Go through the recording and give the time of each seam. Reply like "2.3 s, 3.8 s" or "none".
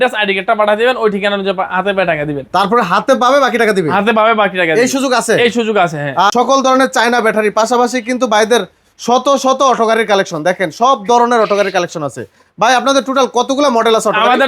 6.3 s